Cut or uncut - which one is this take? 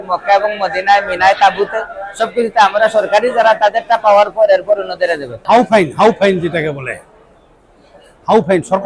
cut